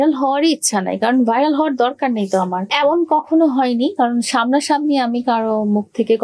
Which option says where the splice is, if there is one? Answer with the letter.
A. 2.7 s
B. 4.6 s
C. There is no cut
A